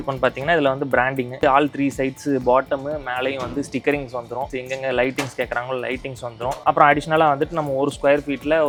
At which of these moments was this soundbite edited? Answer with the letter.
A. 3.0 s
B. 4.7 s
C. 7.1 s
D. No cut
D